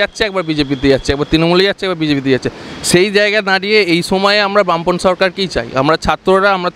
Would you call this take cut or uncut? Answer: uncut